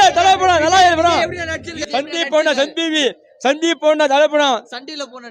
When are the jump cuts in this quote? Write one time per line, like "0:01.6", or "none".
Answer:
0:01.7